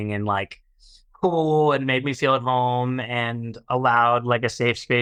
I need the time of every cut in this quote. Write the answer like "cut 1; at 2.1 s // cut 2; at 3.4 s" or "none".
none